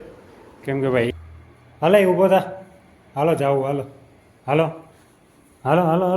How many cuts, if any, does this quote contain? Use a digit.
1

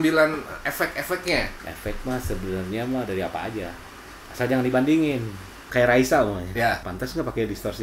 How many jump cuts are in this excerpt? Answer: 3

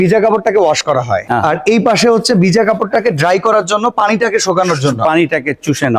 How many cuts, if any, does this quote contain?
1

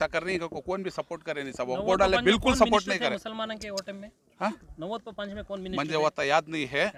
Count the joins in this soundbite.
0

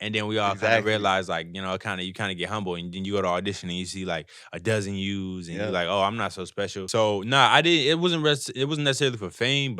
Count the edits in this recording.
1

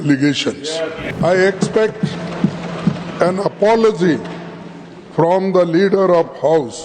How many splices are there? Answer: 1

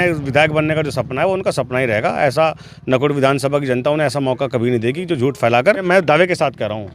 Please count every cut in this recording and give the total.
1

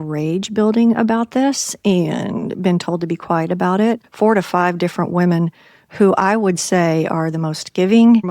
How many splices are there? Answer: 1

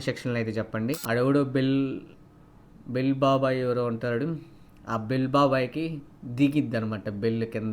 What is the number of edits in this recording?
1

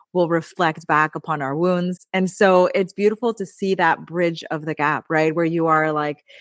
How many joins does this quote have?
0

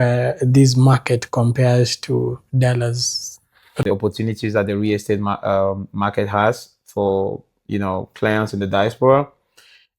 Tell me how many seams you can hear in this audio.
1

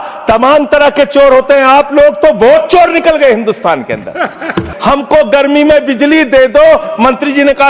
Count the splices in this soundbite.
1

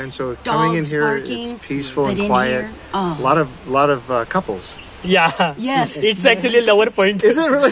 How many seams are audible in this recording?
0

